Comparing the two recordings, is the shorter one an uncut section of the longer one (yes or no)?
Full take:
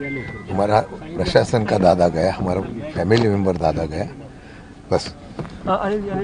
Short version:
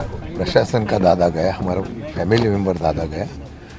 yes